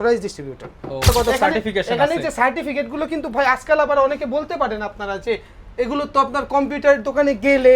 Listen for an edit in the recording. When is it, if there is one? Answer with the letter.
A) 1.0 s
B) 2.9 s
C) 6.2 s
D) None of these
A